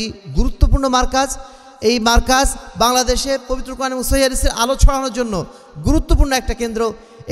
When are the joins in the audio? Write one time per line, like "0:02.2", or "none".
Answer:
none